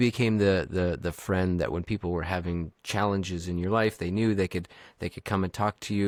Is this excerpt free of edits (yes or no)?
yes